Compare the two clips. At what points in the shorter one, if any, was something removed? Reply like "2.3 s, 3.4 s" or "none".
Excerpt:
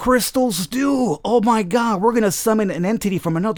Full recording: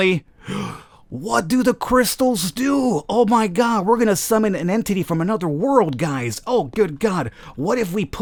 none